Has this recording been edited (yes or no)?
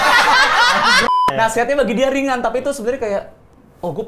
yes